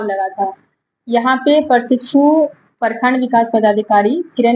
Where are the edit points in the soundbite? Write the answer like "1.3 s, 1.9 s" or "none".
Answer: none